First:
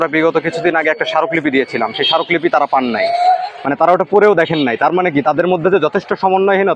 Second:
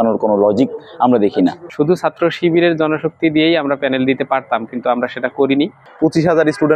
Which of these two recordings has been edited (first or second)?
second